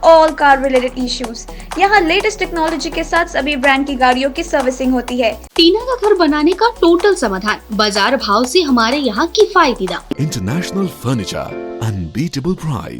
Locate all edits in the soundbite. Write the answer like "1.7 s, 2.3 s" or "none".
5.5 s, 10.2 s